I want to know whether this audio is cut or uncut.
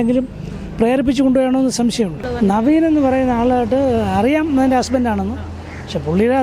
cut